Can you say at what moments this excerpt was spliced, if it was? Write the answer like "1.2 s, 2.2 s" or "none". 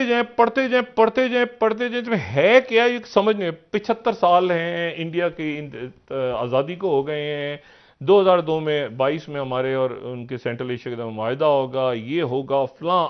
none